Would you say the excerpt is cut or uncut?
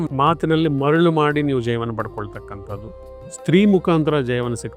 uncut